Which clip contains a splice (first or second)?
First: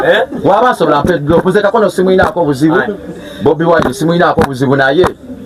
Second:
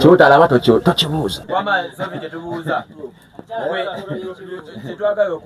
second